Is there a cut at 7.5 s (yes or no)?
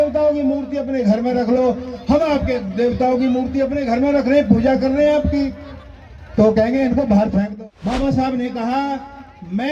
yes